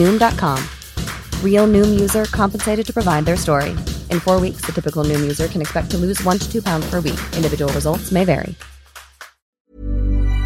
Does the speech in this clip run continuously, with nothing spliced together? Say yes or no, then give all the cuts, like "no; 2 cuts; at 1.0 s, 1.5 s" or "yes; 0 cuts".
no; 1 cut; at 9.5 s